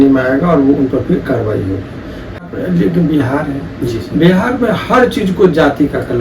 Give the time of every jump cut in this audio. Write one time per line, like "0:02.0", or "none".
0:02.4